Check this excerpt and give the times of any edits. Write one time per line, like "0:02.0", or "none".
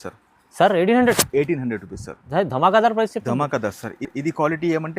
none